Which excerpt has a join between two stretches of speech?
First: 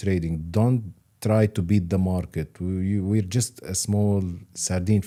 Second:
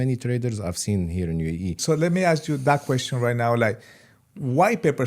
second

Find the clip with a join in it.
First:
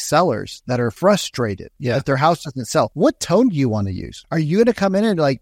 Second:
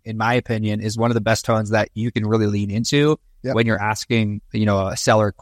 first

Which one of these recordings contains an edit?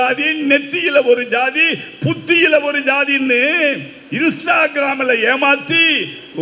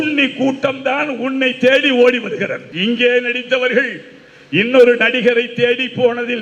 second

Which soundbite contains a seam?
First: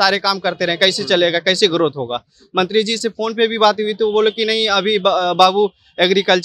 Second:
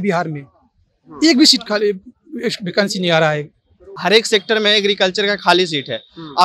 second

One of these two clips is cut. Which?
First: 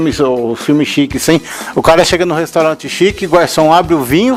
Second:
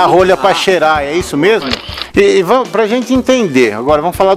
second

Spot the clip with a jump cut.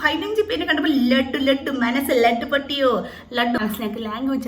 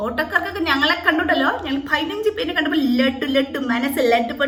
first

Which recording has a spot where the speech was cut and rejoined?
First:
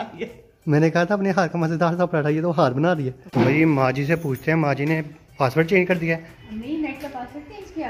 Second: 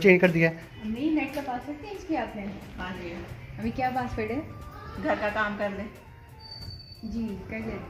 first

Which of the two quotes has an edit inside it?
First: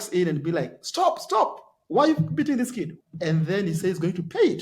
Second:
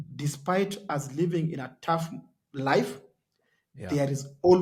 first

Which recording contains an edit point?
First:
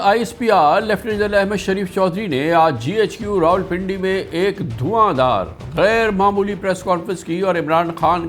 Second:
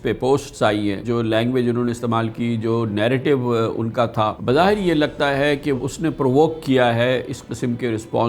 second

